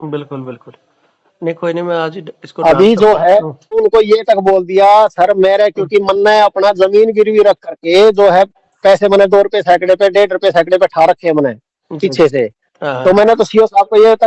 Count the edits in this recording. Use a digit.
1